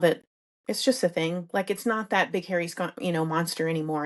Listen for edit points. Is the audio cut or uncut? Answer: uncut